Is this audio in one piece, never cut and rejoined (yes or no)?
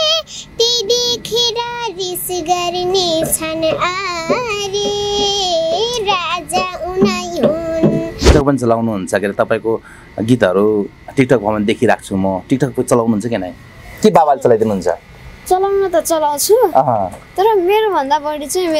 no